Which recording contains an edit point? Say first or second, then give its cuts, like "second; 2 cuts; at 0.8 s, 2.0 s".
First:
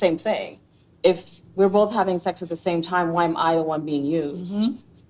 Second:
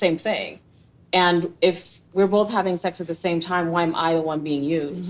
first; 1 cut; at 0.9 s